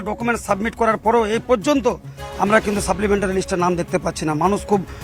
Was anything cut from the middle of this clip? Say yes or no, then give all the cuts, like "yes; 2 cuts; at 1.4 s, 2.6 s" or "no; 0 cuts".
no; 0 cuts